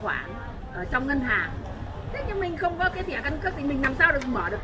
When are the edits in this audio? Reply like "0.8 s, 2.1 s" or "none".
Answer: none